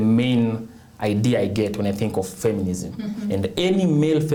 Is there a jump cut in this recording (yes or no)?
no